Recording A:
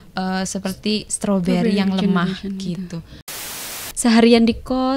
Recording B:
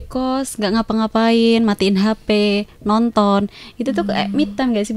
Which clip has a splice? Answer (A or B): A